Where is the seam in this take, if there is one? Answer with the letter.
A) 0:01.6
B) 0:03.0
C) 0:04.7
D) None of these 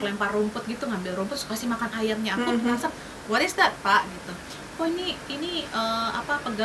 D